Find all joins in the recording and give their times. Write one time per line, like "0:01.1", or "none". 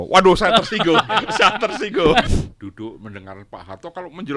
0:02.3